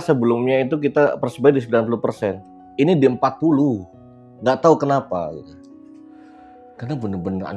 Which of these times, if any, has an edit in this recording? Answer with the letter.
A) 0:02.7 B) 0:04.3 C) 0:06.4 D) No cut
C